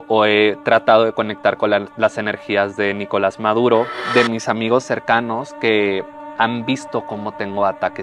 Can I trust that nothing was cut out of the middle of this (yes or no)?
no